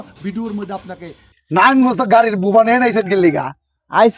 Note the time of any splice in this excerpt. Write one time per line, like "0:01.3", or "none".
0:01.3